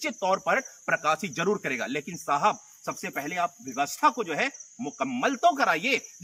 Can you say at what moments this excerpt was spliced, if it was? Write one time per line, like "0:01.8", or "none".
none